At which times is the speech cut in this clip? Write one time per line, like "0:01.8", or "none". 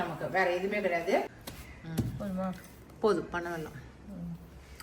0:01.4